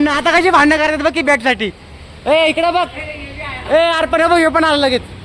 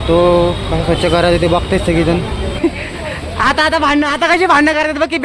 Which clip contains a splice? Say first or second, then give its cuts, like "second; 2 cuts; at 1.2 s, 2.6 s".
second; 1 cut; at 2.6 s